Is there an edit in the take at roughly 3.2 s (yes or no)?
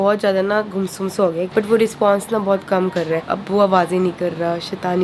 yes